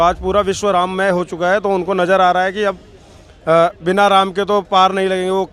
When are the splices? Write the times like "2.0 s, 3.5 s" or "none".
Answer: none